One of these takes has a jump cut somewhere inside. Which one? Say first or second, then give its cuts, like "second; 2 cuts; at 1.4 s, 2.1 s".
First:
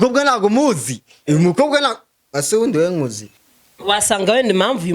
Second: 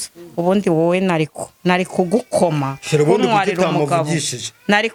first; 1 cut; at 3.4 s